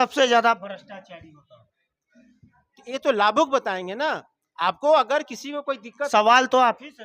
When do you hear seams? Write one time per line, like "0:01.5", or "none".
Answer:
0:06.1